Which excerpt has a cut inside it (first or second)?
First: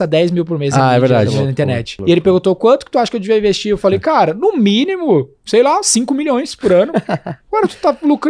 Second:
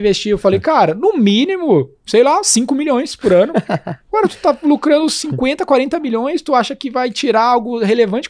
first